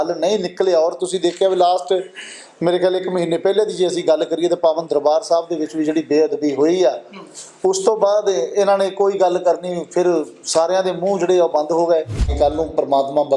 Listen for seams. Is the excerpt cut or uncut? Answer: cut